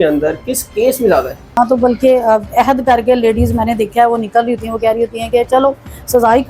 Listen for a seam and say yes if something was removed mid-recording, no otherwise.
yes